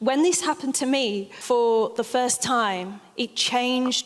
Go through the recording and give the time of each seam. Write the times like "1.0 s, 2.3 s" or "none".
1.3 s